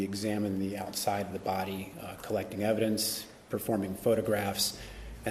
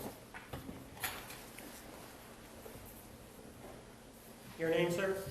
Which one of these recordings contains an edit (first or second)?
second